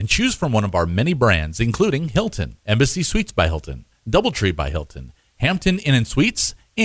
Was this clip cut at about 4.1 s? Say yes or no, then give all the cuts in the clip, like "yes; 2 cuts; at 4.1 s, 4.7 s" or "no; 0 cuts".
no; 1 cut; at 2.1 s